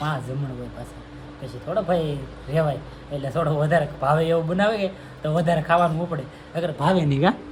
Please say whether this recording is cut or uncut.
uncut